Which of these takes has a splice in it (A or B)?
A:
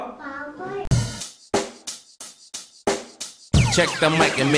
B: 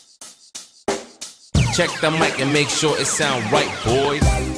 A